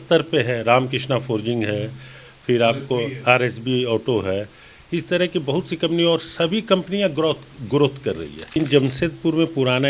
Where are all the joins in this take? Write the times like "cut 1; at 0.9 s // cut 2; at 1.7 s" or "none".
cut 1; at 8.6 s